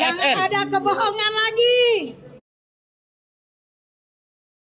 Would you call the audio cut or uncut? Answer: uncut